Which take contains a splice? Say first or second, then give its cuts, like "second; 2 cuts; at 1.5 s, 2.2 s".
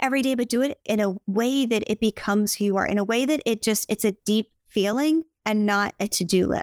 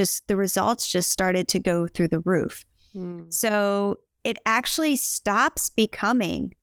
first; 2 cuts; at 1.0 s, 5.3 s